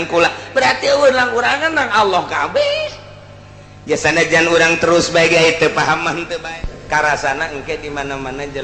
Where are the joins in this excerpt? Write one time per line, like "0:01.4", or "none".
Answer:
0:06.5

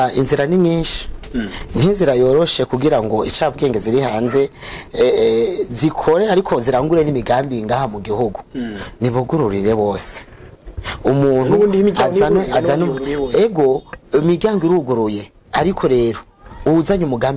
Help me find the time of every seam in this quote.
none

